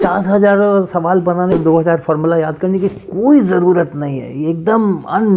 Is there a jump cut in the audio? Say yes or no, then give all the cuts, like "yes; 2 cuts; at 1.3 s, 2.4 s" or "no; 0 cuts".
yes; 1 cut; at 1.5 s